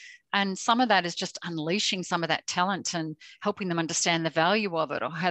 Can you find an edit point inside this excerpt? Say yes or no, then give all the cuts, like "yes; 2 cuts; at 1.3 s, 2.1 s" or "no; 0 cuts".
no; 0 cuts